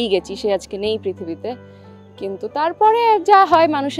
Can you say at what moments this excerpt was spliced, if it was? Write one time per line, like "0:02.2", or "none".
none